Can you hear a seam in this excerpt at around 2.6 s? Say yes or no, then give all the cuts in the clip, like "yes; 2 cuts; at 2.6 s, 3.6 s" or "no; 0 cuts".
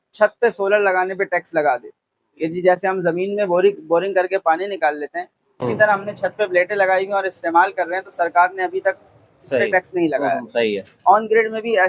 no; 0 cuts